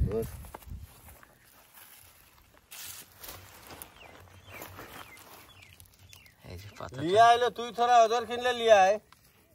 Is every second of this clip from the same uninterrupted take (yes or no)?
yes